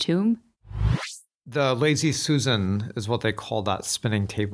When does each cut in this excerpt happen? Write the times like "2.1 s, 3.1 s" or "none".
1.1 s

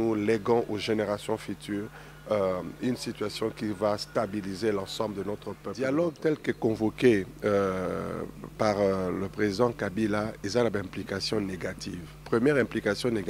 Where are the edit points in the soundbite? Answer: 6.0 s

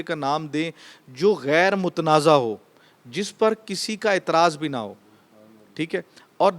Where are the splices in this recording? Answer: none

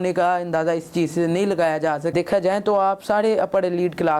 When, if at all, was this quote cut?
2.1 s

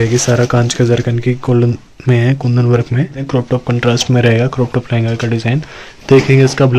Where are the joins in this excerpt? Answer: 3.2 s

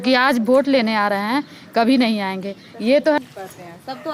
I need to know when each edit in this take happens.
3.2 s

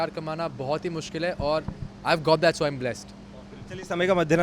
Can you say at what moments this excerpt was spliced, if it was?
none

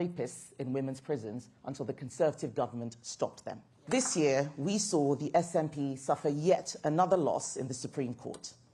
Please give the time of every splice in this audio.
3.7 s

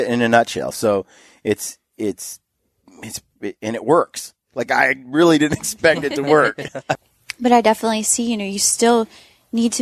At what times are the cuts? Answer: 6.9 s

